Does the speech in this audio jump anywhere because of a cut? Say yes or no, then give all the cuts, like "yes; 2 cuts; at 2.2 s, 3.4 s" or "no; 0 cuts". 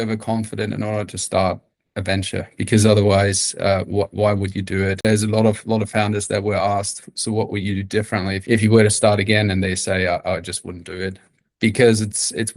yes; 2 cuts; at 5.1 s, 8.4 s